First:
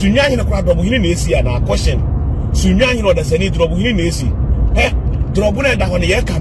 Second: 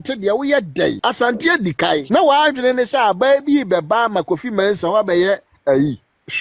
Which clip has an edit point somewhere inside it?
second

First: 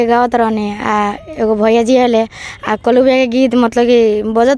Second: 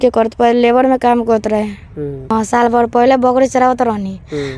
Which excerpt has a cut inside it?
second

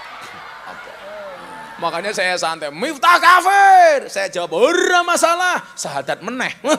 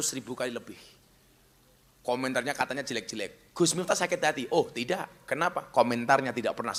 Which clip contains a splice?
first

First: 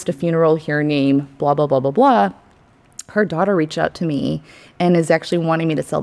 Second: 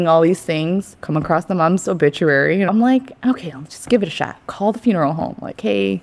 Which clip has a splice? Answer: second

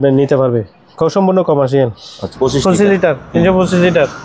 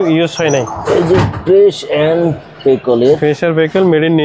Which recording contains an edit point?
first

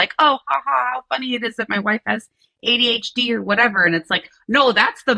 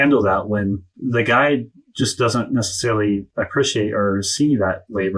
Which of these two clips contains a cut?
second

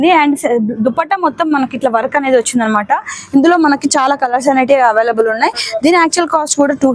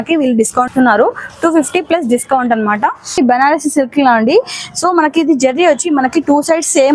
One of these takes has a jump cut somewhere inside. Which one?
second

